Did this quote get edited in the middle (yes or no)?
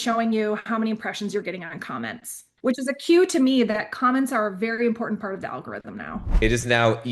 yes